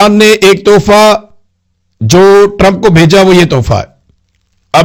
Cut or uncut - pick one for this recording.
uncut